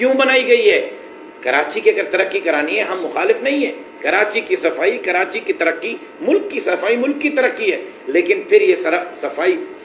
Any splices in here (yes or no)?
no